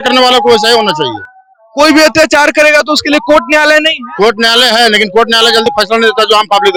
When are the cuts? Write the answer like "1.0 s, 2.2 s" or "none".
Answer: none